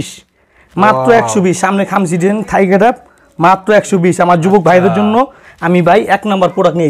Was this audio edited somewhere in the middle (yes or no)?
no